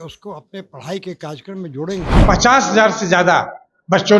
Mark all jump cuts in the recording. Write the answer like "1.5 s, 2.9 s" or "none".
2.2 s